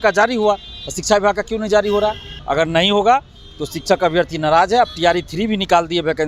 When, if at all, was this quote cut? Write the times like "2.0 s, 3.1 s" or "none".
2.3 s